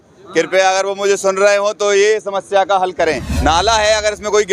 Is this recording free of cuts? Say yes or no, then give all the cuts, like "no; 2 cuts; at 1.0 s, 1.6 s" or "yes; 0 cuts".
no; 1 cut; at 3.3 s